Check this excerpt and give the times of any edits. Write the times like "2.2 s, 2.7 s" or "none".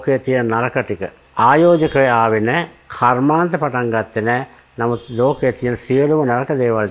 none